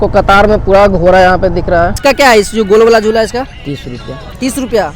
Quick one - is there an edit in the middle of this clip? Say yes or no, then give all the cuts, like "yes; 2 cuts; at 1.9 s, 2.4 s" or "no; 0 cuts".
yes; 1 cut; at 2.0 s